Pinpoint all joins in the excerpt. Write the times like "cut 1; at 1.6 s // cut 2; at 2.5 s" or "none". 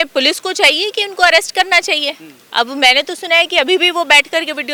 none